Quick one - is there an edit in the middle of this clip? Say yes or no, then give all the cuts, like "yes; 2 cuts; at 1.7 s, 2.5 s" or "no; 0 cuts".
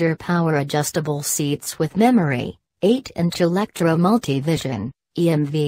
yes; 1 cut; at 2.8 s